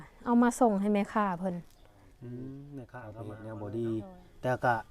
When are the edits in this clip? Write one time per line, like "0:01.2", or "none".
0:03.2